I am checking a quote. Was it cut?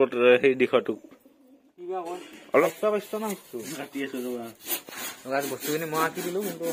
yes; 1 cut; at 2.6 s

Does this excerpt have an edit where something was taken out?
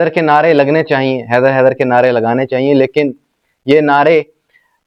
no; 0 cuts

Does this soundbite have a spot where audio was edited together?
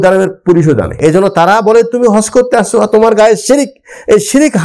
yes; 1 cut; at 0.9 s

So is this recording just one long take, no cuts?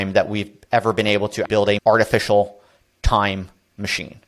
no; 1 cut; at 1.4 s

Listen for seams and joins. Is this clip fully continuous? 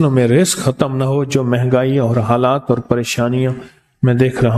yes; 0 cuts

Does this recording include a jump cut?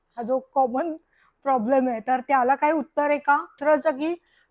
yes; 1 cut; at 3.6 s

